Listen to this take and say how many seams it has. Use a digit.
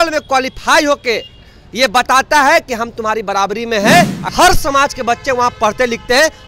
1